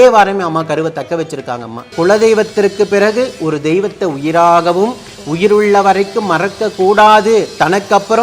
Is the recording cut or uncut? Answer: cut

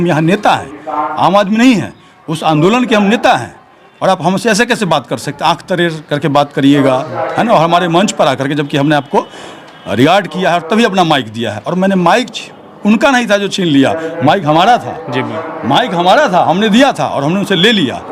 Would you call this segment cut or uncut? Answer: uncut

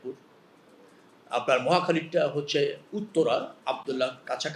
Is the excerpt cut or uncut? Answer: uncut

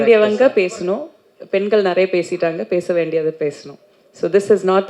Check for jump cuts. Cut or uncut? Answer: uncut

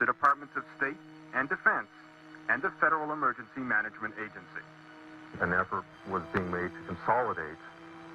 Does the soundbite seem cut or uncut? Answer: cut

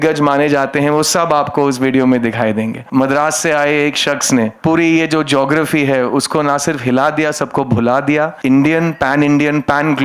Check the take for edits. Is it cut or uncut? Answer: cut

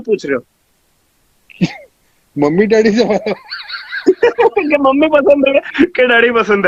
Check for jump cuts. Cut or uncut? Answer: uncut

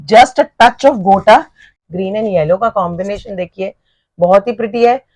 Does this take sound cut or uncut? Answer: cut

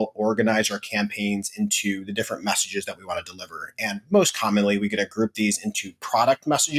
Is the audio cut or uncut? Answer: uncut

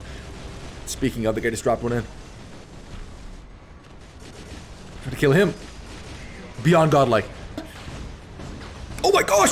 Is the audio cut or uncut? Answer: cut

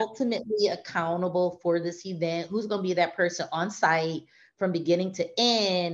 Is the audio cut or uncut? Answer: uncut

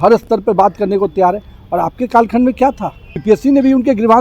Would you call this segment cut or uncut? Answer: cut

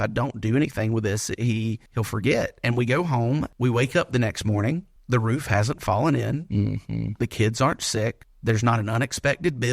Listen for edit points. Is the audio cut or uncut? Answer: cut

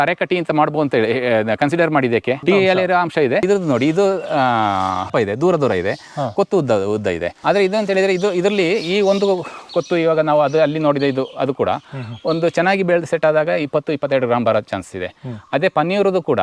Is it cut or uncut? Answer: cut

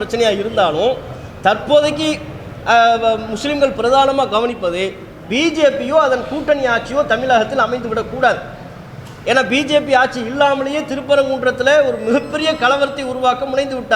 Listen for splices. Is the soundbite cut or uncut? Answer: uncut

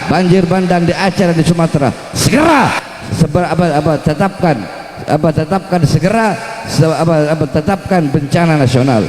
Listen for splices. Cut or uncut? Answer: uncut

